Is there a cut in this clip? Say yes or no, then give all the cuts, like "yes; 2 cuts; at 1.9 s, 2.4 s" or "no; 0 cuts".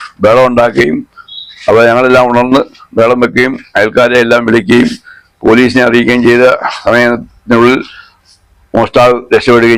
no; 0 cuts